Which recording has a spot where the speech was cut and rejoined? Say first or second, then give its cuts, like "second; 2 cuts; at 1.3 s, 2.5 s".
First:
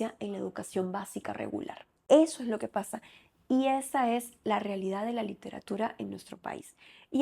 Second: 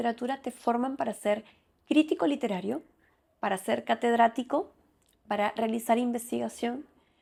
first; 1 cut; at 1.9 s